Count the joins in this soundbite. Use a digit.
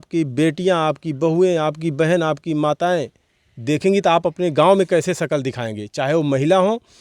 0